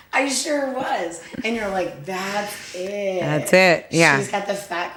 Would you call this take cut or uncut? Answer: uncut